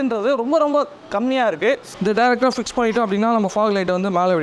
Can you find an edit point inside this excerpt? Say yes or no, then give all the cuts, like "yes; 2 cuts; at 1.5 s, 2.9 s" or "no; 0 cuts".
yes; 1 cut; at 1.9 s